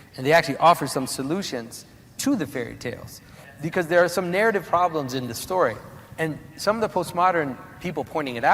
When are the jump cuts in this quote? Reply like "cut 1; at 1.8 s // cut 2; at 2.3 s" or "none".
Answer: cut 1; at 3.4 s